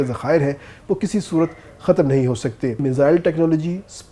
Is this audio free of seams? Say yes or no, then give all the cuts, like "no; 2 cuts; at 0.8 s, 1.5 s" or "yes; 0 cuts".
no; 1 cut; at 2.8 s